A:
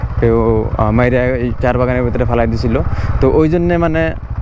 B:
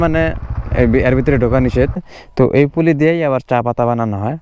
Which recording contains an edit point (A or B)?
B